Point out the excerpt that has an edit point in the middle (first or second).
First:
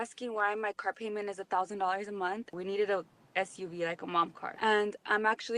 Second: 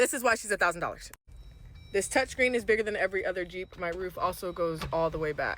first